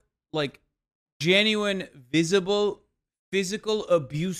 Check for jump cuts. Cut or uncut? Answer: uncut